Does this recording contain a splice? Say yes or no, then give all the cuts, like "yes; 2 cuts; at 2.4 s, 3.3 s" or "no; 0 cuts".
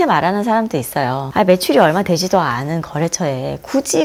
no; 0 cuts